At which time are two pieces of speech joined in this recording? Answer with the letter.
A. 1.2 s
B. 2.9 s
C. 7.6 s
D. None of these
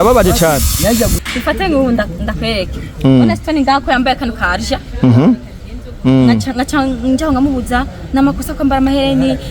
A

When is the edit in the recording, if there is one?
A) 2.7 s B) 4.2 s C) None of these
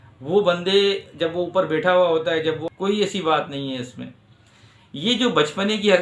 A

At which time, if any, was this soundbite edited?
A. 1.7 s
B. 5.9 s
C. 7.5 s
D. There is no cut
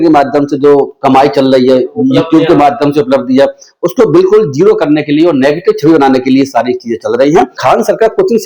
C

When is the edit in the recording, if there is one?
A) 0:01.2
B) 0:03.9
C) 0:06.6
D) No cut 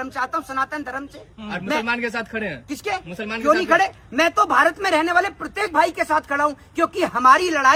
D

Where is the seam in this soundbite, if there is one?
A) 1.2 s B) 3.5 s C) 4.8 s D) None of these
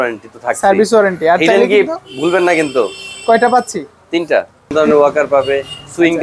C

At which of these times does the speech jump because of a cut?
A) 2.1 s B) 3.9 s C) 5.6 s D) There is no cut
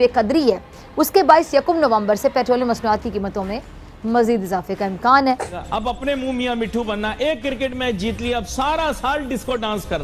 C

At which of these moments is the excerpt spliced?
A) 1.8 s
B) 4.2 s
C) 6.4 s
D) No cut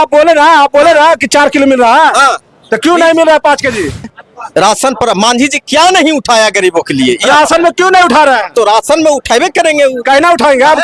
B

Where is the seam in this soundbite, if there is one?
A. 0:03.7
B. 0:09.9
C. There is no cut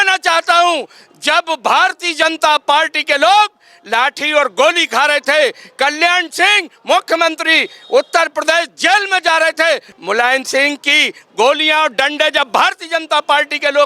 B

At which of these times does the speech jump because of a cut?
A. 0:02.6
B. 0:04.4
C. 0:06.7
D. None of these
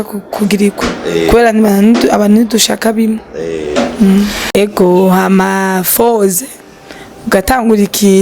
B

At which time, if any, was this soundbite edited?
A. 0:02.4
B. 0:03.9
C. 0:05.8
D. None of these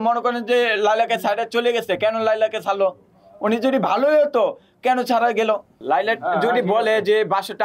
C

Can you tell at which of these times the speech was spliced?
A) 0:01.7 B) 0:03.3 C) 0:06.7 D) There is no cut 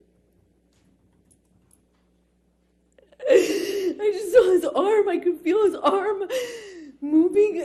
D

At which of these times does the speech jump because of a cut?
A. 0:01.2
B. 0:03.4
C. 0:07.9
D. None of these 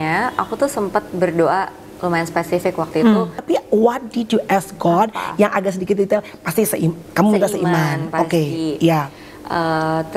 B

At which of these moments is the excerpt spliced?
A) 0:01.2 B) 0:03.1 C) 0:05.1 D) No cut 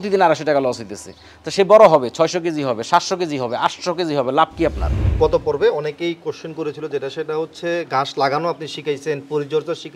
C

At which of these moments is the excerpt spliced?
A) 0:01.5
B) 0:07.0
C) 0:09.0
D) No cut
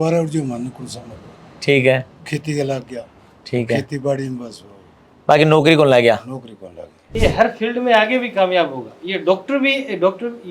B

